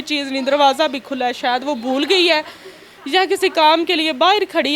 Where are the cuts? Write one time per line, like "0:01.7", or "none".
none